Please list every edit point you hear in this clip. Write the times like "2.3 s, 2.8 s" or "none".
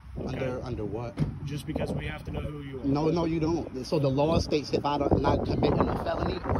none